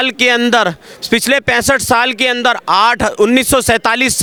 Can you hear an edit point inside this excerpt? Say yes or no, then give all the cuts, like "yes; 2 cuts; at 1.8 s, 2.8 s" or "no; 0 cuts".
no; 0 cuts